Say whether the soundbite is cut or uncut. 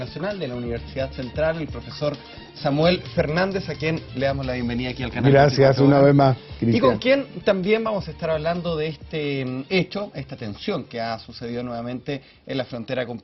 cut